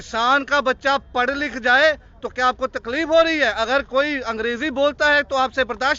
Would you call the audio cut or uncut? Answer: uncut